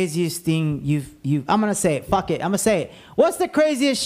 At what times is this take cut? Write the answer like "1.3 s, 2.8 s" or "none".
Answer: none